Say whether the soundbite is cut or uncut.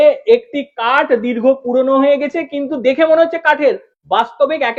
uncut